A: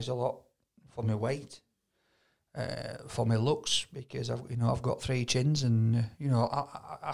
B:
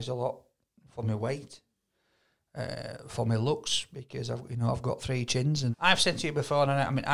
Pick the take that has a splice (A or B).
B